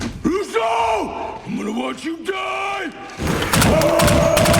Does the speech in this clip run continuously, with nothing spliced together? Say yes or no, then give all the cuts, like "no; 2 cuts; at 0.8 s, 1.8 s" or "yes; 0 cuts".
no; 2 cuts; at 1.4 s, 3.6 s